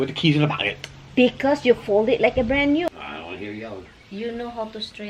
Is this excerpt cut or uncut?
cut